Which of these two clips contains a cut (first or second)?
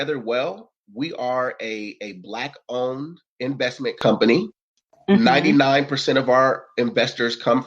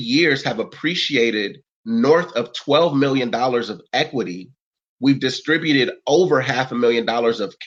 first